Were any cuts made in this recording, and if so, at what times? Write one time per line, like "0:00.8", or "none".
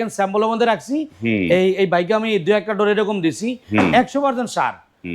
none